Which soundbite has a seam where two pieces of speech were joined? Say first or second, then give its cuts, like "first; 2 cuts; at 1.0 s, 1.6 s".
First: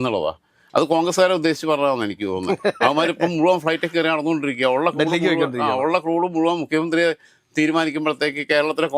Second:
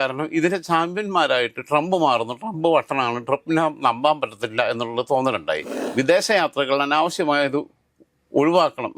second; 1 cut; at 5.8 s